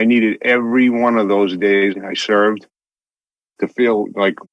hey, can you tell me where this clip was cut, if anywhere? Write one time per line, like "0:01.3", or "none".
0:01.9